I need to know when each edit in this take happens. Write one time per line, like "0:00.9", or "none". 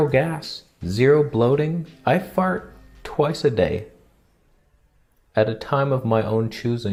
none